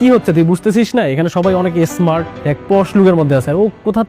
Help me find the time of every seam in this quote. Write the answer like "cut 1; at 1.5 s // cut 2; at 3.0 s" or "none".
cut 1; at 2.3 s

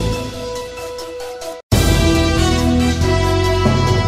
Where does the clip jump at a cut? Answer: none

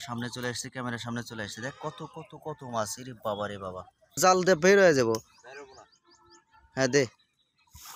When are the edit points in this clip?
cut 1; at 4.1 s

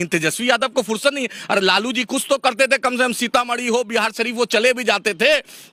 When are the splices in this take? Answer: none

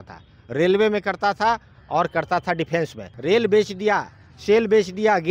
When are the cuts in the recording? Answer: cut 1; at 3.1 s

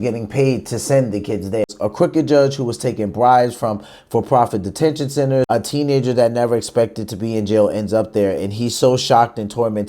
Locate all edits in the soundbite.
cut 1; at 1.7 s // cut 2; at 5.5 s

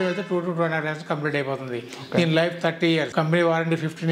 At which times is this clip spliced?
cut 1; at 3.1 s

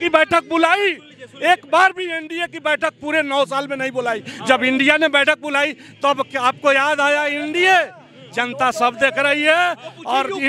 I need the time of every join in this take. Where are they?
none

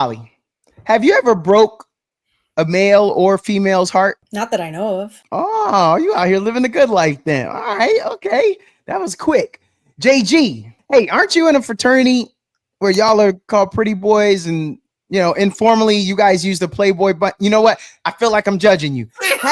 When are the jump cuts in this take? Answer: cut 1; at 4.2 s // cut 2; at 5.2 s // cut 3; at 10.7 s

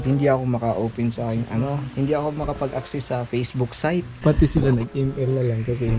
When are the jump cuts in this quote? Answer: cut 1; at 4.1 s

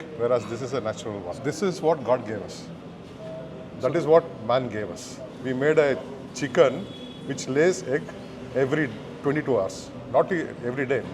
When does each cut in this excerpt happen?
none

